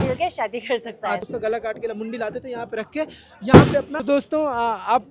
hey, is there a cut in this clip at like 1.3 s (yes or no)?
yes